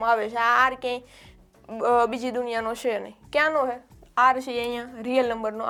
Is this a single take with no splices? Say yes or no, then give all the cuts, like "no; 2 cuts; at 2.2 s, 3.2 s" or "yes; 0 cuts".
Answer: yes; 0 cuts